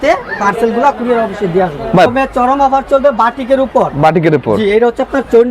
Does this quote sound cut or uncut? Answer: cut